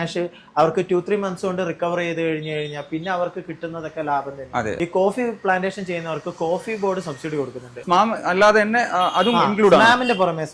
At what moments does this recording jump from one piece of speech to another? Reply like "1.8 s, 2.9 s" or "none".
4.8 s, 7.8 s